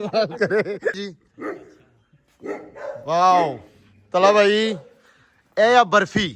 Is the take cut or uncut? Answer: cut